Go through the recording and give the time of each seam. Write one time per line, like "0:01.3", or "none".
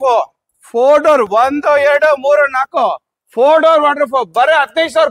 none